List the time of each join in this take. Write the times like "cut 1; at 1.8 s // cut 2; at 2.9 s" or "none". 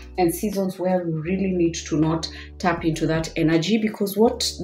none